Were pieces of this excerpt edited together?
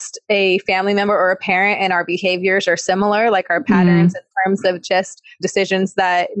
no; 0 cuts

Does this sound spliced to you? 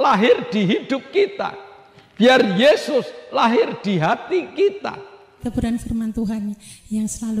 yes; 1 cut; at 5.4 s

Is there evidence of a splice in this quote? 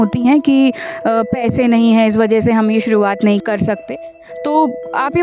no; 0 cuts

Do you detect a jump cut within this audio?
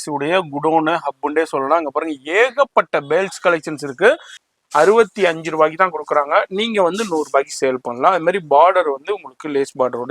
yes; 1 cut; at 4.5 s

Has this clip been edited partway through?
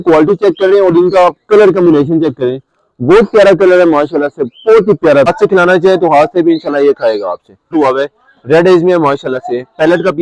yes; 2 cuts; at 5.3 s, 7.7 s

